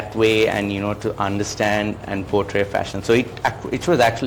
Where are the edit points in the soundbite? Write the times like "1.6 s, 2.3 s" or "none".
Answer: none